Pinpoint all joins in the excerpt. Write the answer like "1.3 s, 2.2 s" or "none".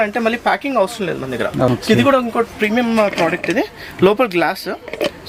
1.7 s